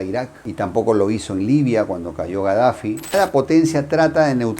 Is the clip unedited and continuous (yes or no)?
no